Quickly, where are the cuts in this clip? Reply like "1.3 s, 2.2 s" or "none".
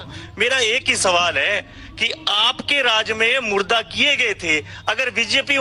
none